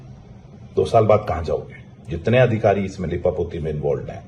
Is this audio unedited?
yes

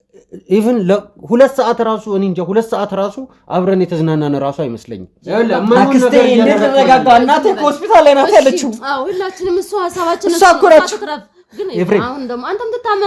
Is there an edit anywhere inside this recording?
yes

